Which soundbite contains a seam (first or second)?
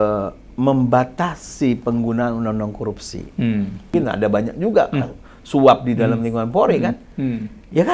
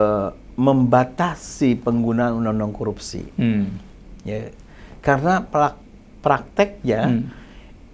first